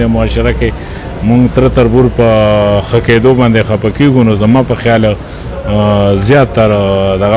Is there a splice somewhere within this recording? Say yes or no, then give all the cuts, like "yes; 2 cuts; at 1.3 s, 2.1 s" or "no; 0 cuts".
no; 0 cuts